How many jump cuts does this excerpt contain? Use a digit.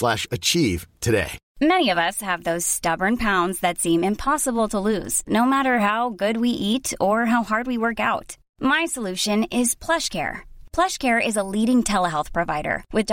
1